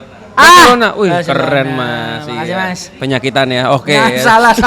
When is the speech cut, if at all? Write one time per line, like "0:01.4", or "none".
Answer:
none